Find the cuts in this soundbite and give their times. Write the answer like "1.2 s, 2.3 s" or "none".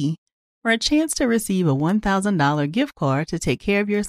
none